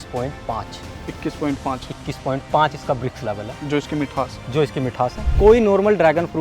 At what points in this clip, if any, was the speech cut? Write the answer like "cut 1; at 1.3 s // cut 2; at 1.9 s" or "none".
cut 1; at 5.2 s